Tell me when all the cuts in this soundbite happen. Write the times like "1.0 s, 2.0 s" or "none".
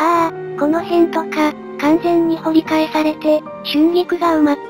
none